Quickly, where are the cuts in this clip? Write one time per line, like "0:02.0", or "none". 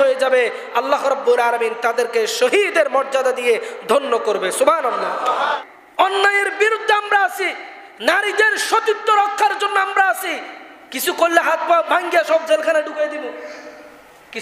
0:05.6